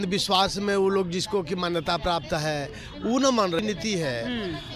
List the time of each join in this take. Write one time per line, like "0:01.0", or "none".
0:03.6